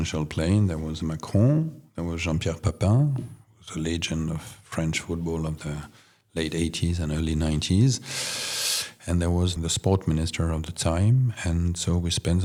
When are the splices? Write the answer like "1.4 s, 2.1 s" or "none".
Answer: none